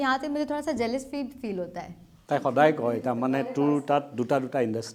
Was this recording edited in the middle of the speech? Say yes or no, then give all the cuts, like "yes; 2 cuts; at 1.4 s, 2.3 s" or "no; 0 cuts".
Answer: no; 0 cuts